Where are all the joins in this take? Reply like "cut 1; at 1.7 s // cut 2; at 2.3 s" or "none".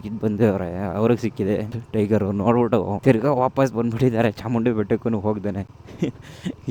none